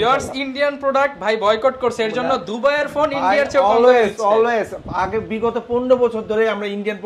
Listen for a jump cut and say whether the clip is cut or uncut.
uncut